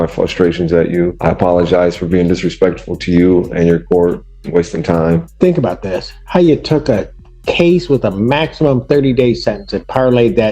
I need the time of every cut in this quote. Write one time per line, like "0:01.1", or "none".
0:01.2
0:05.3